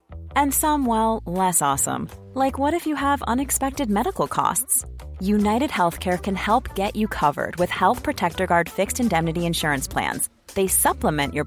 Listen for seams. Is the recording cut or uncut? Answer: uncut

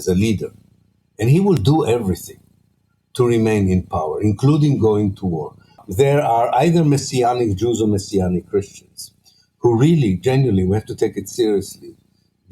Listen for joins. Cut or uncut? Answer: cut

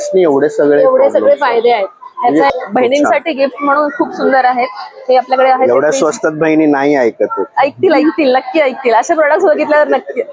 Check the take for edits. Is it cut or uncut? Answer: cut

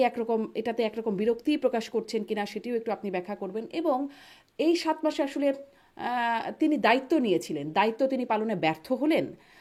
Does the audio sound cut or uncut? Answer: uncut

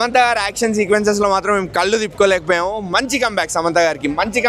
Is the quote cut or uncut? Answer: uncut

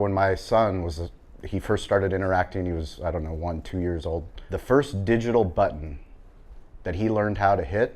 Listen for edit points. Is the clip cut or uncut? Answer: cut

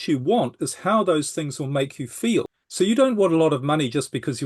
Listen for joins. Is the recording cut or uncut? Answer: cut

